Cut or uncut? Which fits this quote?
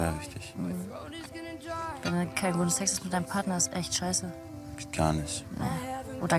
uncut